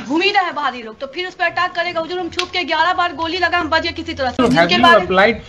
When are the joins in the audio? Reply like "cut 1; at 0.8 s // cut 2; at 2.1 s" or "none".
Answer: cut 1; at 4.4 s